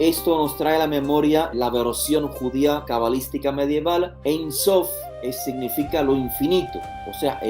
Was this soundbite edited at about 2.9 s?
yes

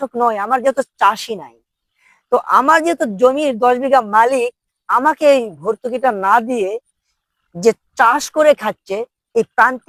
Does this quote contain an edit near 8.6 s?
no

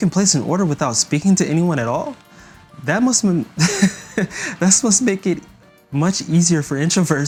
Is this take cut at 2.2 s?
no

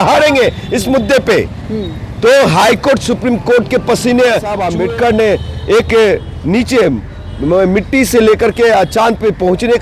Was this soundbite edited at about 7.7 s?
no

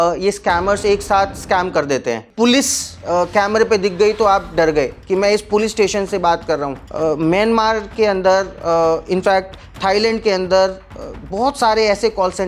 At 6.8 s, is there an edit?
yes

